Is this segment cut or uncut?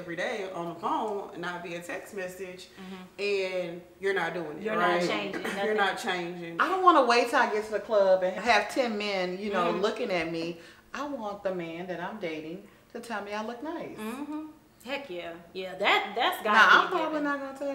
cut